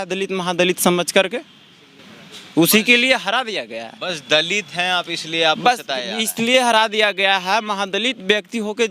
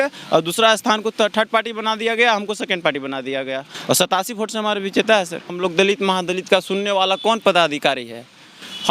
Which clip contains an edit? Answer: second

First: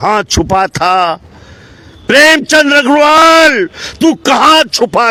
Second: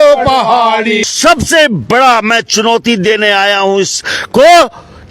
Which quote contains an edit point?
second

